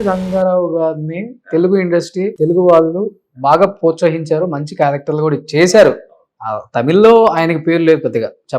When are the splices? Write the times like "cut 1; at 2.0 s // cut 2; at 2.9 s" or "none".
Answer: cut 1; at 2.3 s